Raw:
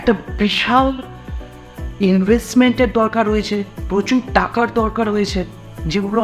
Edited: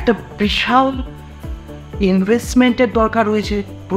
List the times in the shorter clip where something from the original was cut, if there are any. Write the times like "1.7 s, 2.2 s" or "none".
none